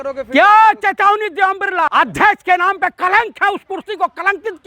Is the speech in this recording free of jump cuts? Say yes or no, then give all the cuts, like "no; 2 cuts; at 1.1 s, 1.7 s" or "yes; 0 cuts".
no; 1 cut; at 1.9 s